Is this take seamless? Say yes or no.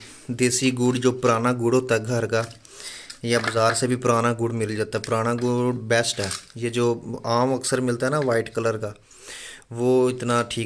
yes